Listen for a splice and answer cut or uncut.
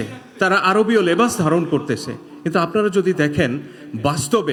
uncut